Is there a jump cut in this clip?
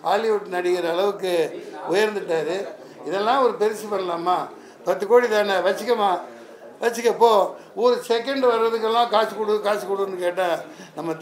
no; 0 cuts

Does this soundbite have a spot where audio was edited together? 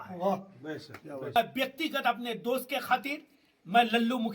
yes; 1 cut; at 1.4 s

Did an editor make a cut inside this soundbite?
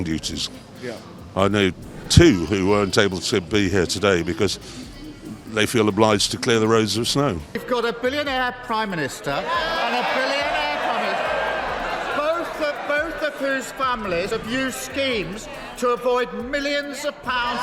yes; 1 cut; at 7.5 s

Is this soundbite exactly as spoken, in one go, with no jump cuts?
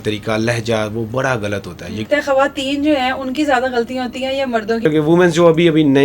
no; 2 cuts; at 2.1 s, 4.8 s

